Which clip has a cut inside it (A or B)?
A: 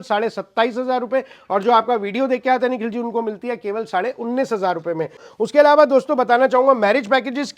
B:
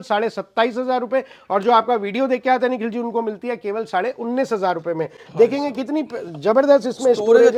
A